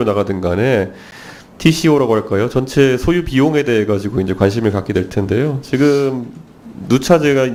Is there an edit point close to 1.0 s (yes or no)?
no